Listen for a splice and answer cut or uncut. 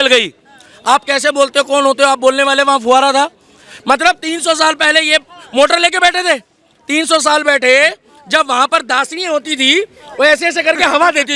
uncut